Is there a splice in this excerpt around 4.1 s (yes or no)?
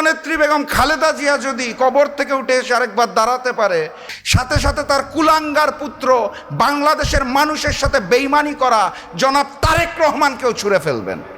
yes